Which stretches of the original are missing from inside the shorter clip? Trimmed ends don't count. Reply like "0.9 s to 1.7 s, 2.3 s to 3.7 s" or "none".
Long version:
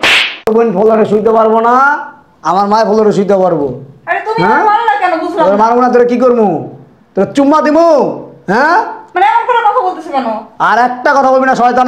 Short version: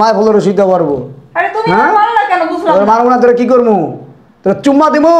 none